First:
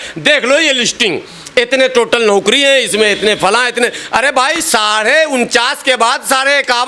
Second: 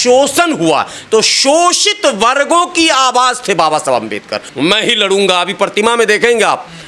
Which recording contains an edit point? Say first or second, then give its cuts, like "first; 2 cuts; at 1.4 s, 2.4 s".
second; 1 cut; at 4.4 s